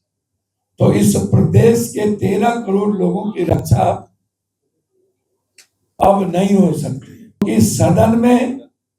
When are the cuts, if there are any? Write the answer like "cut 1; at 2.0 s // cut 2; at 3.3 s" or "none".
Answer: cut 1; at 7.4 s